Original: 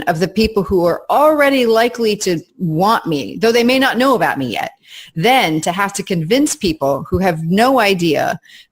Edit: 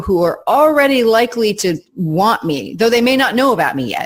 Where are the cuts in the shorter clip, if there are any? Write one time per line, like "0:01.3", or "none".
none

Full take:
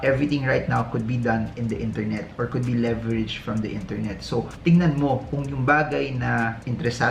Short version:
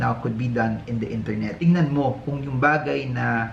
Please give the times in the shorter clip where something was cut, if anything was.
0:01.6

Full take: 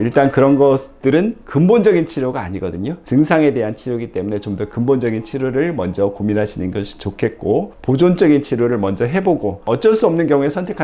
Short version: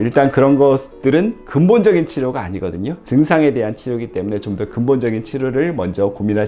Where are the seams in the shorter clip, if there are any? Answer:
none

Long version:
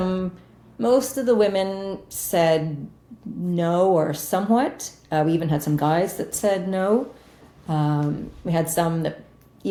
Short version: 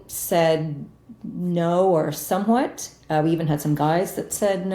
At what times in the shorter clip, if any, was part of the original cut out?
none

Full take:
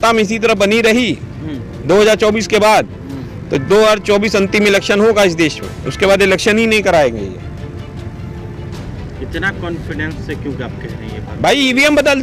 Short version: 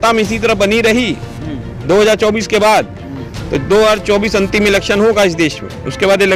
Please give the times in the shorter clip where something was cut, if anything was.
none

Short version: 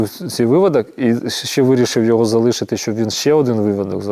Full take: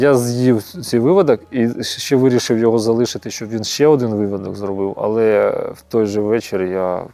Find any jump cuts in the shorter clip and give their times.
none

